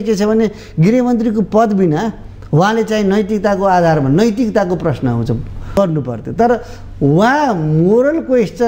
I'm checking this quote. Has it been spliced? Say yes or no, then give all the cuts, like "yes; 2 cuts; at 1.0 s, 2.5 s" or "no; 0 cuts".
yes; 1 cut; at 5.8 s